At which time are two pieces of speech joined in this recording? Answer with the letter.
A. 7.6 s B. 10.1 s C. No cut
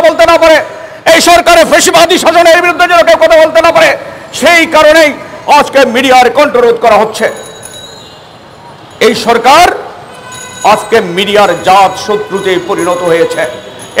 C